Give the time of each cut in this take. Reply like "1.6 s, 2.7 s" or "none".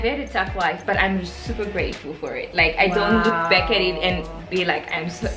none